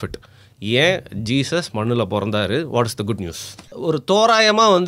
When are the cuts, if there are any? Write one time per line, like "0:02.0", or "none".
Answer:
0:03.7